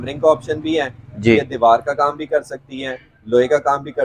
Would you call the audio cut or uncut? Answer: uncut